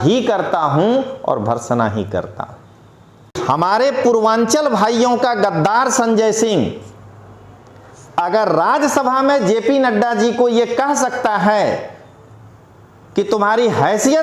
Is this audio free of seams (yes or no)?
no